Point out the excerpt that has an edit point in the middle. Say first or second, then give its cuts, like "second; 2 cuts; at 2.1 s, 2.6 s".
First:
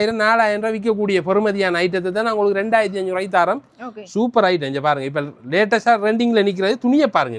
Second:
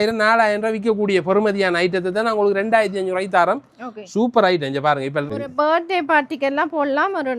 second; 1 cut; at 5.4 s